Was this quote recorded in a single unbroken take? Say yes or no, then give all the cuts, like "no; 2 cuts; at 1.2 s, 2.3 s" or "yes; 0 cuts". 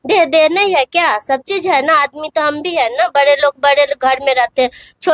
yes; 0 cuts